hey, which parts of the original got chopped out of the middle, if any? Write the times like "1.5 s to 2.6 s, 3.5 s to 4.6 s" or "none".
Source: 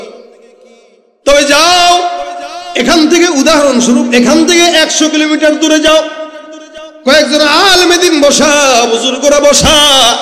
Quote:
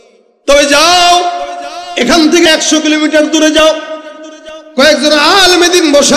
3.3 s to 4.8 s